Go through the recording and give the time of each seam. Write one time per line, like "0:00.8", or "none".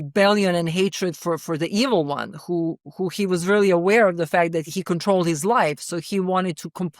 0:01.4
0:04.7